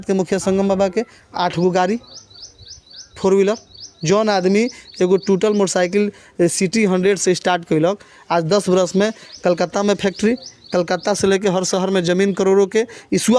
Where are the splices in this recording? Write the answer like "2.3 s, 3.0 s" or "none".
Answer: none